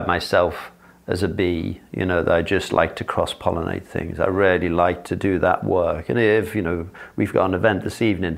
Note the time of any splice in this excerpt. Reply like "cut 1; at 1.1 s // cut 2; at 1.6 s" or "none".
none